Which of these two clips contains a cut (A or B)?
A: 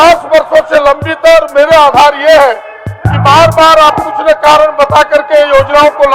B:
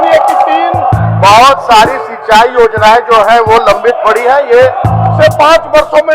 B